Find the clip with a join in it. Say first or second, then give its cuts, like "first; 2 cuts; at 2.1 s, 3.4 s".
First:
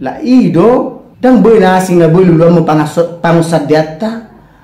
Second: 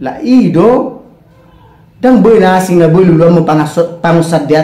first; 1 cut; at 1.0 s